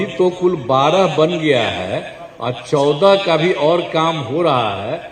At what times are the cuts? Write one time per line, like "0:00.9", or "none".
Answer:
none

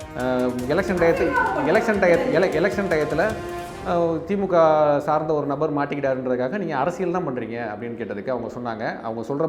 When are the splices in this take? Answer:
none

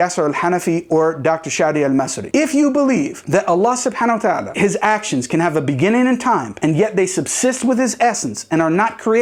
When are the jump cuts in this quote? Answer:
none

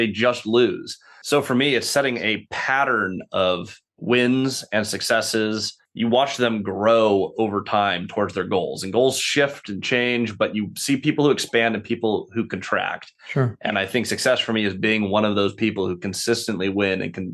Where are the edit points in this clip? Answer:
0:01.2

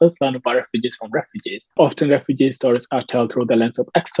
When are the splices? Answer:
none

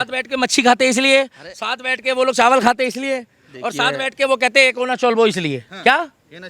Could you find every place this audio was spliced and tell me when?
none

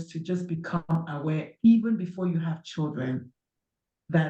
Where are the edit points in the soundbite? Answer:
none

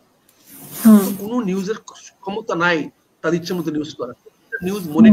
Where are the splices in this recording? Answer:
none

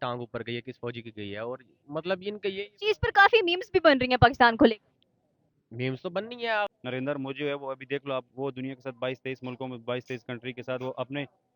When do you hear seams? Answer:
0:06.7

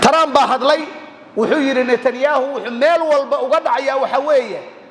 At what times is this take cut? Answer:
none

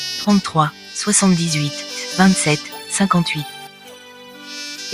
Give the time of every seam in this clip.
0:01.4

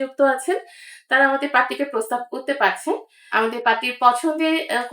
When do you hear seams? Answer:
0:03.2

